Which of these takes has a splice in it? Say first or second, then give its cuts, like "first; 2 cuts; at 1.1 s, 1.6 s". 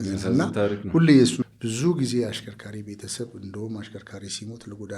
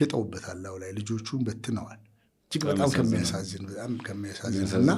first; 1 cut; at 1.4 s